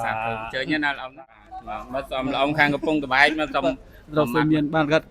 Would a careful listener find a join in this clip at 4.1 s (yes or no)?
no